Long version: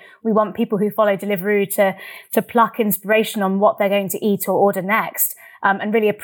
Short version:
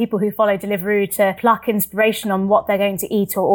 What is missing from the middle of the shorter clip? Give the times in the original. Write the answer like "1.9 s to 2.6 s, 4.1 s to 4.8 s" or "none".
2.0 s to 2.5 s